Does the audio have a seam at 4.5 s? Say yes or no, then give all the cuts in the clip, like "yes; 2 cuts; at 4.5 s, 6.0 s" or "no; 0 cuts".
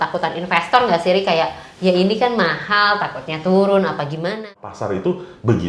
yes; 1 cut; at 4.5 s